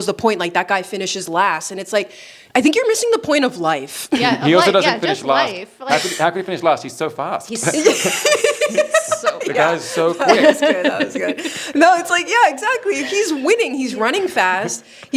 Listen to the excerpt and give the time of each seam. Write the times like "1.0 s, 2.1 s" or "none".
none